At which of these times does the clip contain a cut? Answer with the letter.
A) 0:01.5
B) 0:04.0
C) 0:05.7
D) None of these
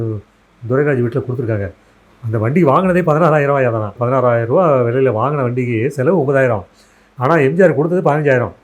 B